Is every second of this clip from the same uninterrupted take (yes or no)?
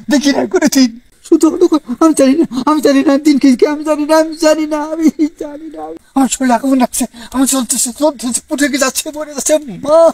no